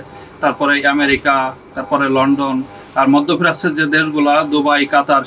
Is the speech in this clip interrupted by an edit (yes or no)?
no